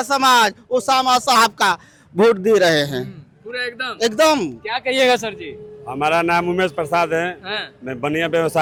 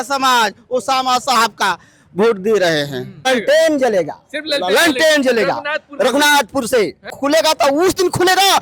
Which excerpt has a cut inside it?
second; 2 cuts; at 3.3 s, 7.1 s

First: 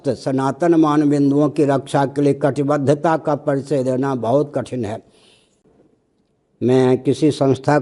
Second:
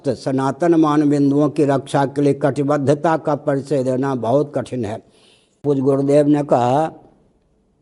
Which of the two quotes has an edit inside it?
second; 1 cut; at 5.6 s

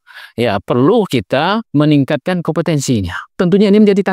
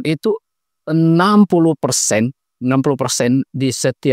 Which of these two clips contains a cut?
first; 2 cuts; at 1.7 s, 3.2 s

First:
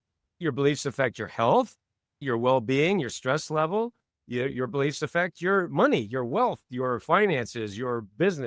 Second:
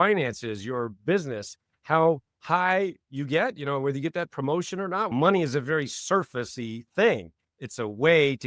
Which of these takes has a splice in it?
second; 1 cut; at 5.1 s

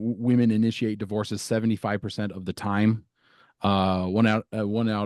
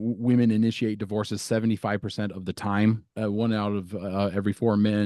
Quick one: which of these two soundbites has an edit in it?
second; 1 cut; at 3.1 s

